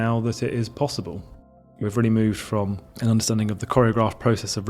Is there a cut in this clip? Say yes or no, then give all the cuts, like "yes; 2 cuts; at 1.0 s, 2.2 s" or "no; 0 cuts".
yes; 2 cuts; at 1.8 s, 2.9 s